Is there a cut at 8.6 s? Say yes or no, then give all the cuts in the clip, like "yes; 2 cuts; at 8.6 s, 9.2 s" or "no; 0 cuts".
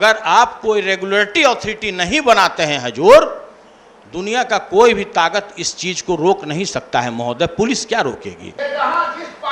yes; 1 cut; at 8.6 s